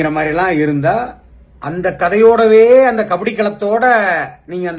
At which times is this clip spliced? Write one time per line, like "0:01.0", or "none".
none